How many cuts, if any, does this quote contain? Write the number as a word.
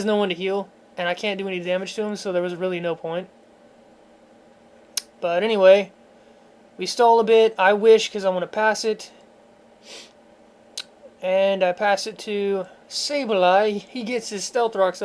zero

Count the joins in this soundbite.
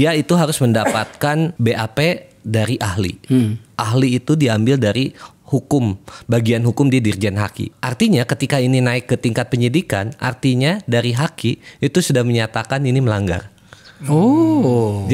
two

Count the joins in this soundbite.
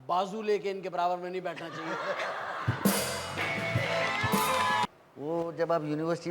one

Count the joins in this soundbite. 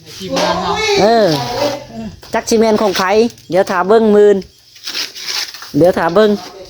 zero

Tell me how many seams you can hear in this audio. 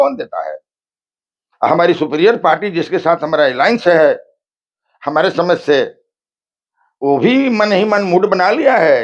zero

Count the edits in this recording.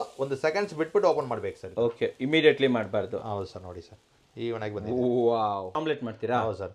one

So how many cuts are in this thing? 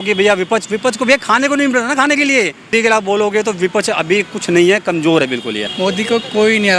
one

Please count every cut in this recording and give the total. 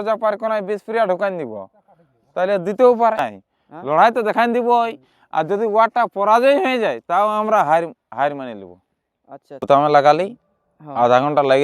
two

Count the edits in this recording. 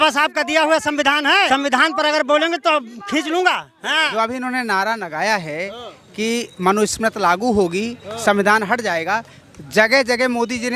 two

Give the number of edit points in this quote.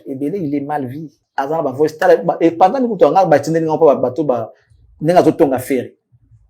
one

